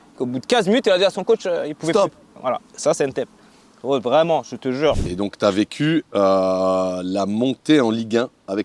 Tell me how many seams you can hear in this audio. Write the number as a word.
one